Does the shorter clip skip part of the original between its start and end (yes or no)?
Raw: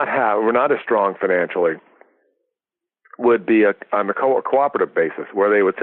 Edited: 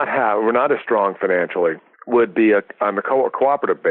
yes